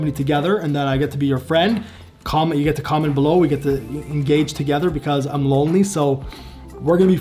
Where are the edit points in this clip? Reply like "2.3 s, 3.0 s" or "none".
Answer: none